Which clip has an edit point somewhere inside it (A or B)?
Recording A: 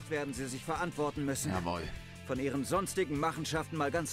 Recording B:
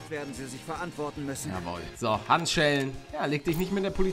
B